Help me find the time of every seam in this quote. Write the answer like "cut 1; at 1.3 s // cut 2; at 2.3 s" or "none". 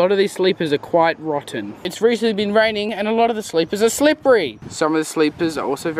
none